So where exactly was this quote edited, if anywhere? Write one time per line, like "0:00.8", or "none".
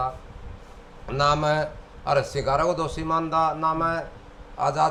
none